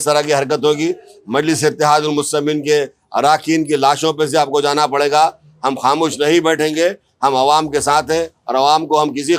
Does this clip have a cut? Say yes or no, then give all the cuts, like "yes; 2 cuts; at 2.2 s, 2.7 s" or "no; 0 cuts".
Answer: no; 0 cuts